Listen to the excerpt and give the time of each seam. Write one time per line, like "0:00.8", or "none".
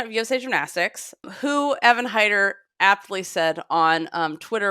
0:01.2